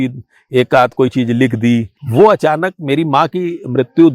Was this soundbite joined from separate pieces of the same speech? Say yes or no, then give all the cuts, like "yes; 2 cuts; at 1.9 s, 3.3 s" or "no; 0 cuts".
yes; 1 cut; at 2.0 s